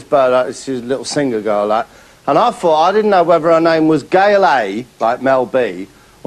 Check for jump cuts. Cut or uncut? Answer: uncut